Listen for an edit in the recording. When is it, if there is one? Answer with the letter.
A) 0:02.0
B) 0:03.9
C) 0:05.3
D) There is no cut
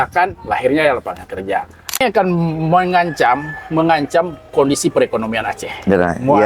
A